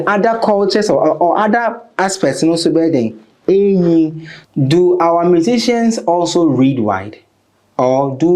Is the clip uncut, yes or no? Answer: no